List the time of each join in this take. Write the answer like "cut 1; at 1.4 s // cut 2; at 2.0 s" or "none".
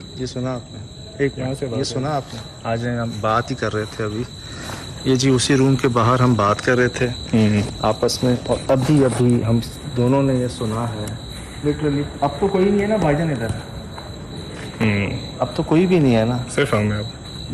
cut 1; at 1.3 s